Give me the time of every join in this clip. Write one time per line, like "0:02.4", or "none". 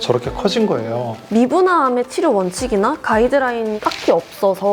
0:01.2
0:03.7